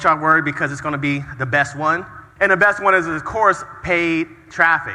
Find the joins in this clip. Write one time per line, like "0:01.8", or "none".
0:02.2